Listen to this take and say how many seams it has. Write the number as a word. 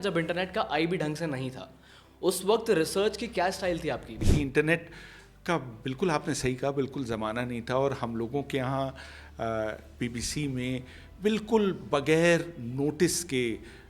one